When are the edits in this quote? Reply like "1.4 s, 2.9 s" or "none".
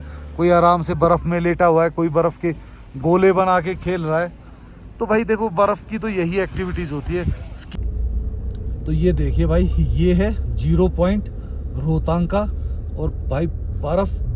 7.8 s